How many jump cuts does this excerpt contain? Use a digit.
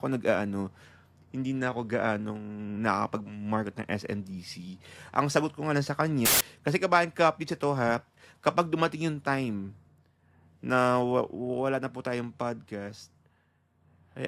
1